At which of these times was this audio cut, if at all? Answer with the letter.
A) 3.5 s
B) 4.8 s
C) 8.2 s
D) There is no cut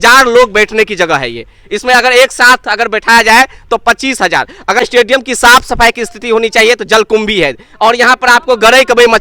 B